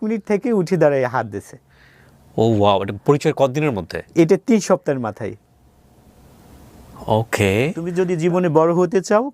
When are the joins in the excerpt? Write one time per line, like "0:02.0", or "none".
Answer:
0:07.9